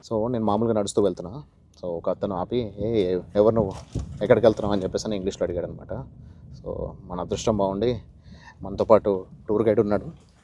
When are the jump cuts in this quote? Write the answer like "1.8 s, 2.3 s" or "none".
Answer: none